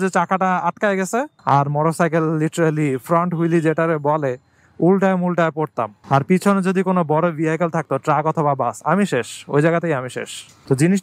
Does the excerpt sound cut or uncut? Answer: uncut